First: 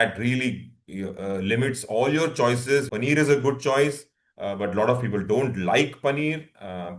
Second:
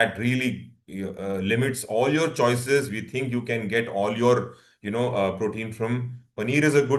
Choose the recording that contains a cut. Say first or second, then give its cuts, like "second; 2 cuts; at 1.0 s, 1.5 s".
first; 1 cut; at 2.9 s